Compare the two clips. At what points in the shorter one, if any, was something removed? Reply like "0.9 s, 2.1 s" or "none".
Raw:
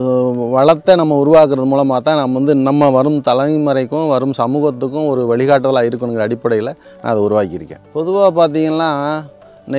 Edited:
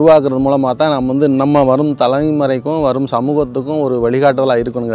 none